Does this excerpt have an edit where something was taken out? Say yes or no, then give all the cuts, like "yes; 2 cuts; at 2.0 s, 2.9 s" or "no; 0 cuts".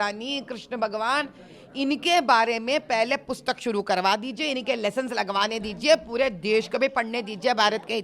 no; 0 cuts